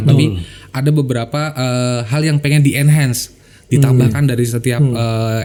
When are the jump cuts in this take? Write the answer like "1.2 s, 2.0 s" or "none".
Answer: none